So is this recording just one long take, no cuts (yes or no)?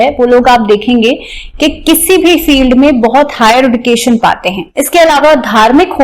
no